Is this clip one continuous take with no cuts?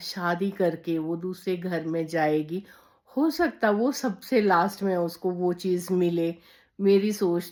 yes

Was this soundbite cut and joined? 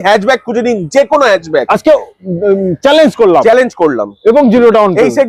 no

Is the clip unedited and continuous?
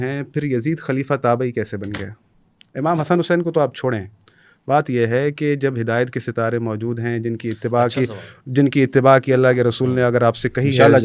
yes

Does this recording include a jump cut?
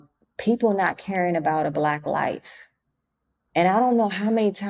no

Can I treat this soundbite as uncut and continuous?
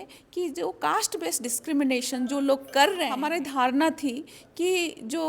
no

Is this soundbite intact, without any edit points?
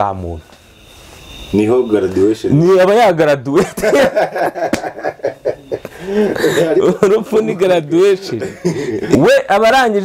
no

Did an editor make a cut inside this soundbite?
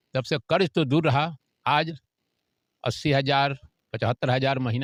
no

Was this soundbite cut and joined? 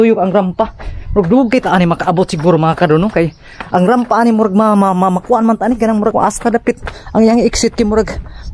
yes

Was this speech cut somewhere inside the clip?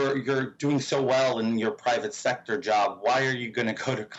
no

